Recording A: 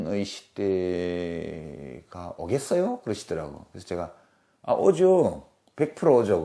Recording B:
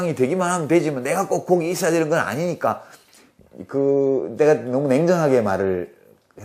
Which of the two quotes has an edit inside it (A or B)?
B